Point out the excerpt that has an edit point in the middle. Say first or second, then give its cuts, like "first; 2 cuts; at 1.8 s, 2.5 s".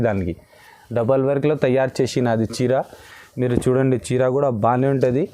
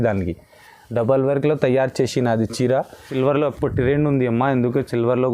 second; 1 cut; at 3.1 s